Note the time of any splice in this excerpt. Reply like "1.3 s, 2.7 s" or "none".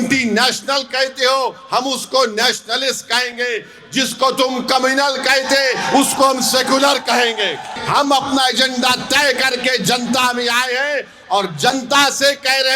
7.8 s